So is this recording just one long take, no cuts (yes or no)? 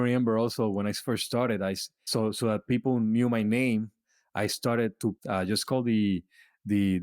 no